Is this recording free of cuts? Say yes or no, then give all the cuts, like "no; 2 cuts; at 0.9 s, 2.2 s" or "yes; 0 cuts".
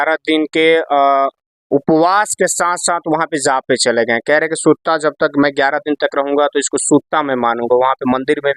yes; 0 cuts